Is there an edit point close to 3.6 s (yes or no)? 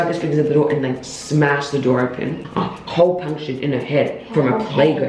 no